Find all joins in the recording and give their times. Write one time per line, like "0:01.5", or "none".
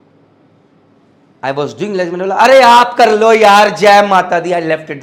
none